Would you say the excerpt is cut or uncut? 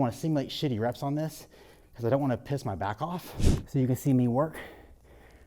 cut